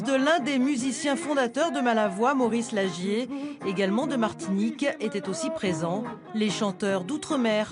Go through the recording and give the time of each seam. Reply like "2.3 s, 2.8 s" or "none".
6.2 s